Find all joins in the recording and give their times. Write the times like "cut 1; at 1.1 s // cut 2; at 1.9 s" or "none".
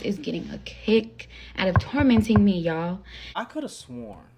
cut 1; at 3.2 s